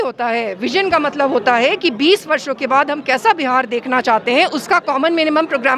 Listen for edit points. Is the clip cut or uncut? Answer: uncut